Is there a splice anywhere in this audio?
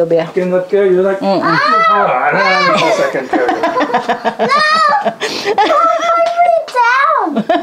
no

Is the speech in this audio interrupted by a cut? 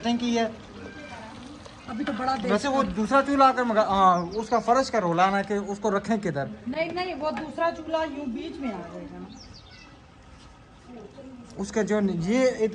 no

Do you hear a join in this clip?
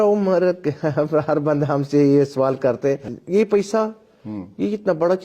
yes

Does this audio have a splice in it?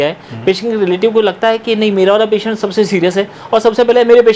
no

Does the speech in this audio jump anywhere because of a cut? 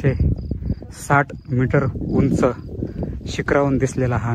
no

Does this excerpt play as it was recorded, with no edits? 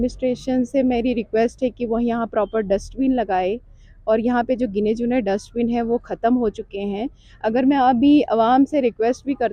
yes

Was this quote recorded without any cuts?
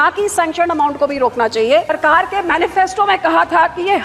no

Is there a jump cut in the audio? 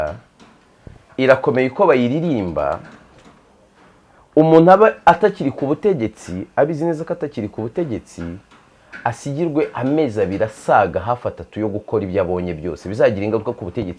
no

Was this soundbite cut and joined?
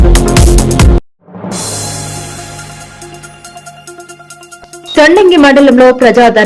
yes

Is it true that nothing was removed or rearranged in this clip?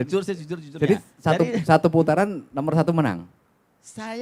yes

